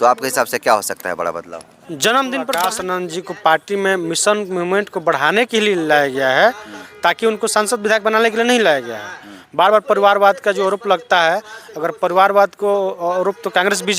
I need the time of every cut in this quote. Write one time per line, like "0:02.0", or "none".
0:02.6